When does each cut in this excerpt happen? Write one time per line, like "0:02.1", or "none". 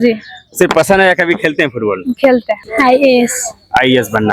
0:02.6